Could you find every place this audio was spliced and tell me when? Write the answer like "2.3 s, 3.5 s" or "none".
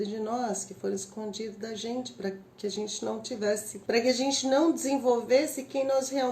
3.7 s